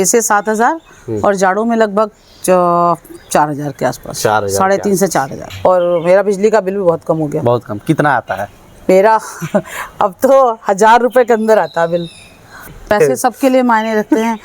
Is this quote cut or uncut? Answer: cut